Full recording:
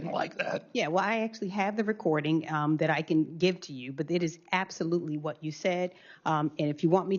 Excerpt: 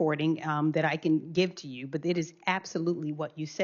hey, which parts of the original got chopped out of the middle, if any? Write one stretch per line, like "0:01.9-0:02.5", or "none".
none